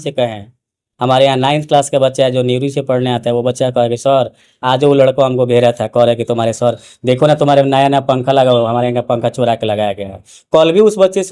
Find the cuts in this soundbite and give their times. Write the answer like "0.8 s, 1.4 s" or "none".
none